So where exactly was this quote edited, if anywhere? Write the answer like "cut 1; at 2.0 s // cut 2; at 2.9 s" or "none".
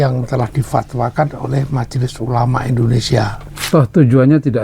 cut 1; at 3.5 s